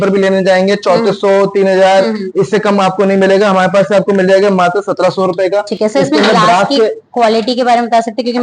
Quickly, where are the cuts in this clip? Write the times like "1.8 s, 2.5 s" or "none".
none